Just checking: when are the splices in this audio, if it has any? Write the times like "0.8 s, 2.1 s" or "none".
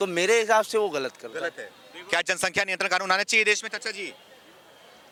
none